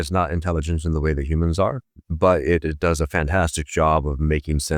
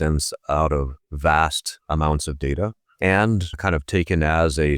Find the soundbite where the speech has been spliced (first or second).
second